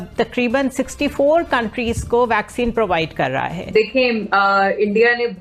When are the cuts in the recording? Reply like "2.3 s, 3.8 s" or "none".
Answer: 4.0 s